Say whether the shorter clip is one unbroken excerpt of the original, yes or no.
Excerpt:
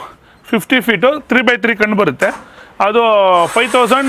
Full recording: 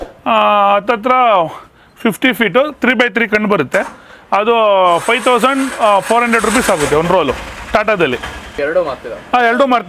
yes